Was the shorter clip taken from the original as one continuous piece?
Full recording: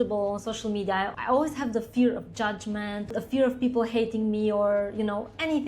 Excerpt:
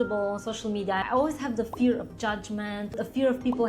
no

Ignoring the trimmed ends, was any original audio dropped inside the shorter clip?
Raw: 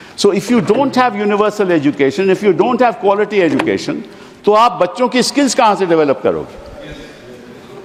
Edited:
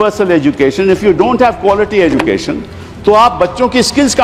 no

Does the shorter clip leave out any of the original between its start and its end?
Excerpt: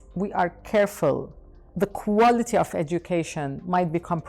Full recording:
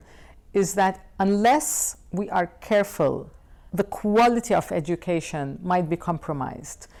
no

